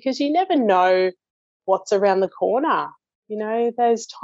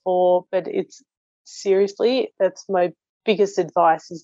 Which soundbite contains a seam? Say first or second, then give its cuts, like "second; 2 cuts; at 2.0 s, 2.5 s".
second; 1 cut; at 3.1 s